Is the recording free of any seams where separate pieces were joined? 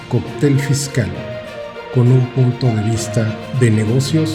yes; 0 cuts

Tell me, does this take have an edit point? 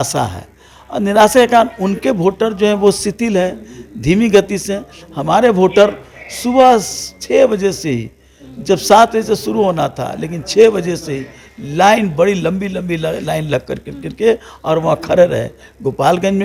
no; 0 cuts

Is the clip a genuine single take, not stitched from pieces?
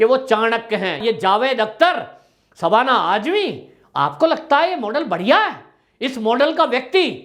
no; 1 cut; at 0.9 s

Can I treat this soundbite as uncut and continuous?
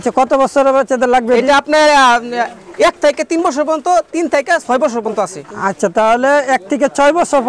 yes; 0 cuts

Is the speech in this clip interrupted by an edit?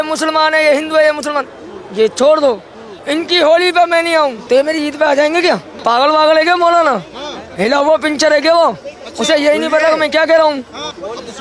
yes; 3 cuts; at 2.9 s, 4.4 s, 5.7 s

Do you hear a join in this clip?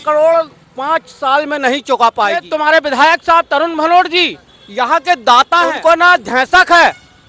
yes; 2 cuts; at 2.4 s, 5.7 s

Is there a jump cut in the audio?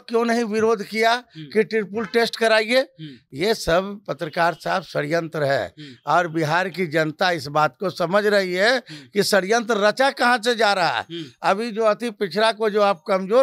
no; 0 cuts

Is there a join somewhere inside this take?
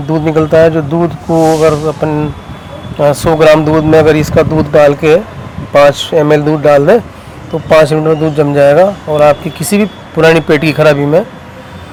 no; 0 cuts

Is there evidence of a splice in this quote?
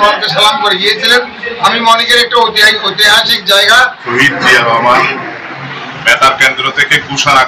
yes; 1 cut; at 4.0 s

